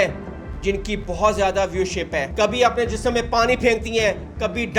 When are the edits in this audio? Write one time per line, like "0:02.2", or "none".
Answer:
0:02.3